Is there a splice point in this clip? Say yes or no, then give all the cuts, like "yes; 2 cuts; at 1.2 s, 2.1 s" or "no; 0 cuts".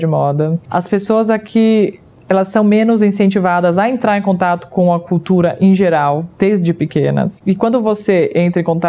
yes; 2 cuts; at 6.3 s, 7.3 s